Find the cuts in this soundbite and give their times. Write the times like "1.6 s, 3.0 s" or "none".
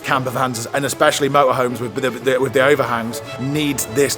none